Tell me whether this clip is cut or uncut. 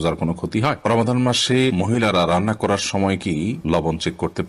cut